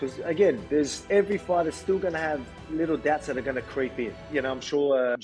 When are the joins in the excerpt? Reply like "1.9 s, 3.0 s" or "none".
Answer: none